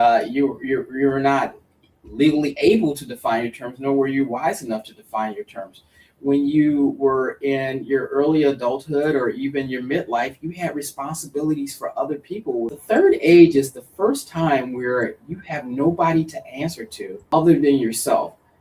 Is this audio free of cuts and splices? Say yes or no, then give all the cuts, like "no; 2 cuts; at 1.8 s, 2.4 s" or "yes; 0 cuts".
no; 2 cuts; at 12.8 s, 17.2 s